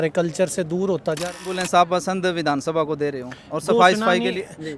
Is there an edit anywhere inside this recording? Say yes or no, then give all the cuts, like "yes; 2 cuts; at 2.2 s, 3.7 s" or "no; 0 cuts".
yes; 1 cut; at 1.5 s